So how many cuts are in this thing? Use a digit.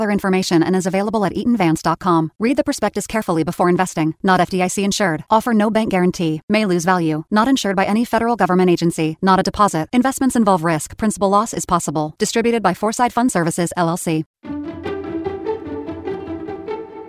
1